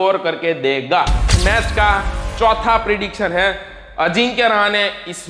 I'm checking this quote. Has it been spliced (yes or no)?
yes